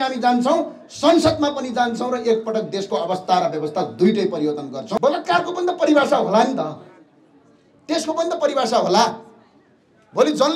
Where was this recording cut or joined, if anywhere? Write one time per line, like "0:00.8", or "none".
0:05.0